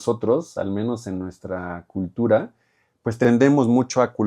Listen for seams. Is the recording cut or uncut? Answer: cut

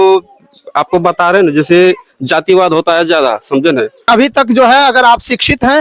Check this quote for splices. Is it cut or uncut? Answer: cut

